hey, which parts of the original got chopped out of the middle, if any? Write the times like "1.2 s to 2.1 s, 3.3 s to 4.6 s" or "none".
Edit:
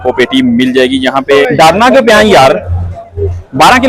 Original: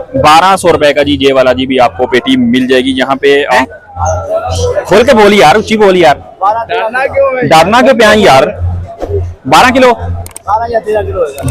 3.4 s to 7.4 s